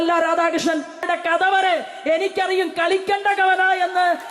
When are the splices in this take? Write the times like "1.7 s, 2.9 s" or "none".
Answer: 1.0 s